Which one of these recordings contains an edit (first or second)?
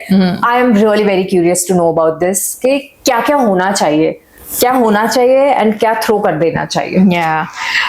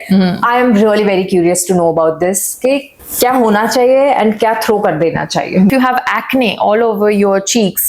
second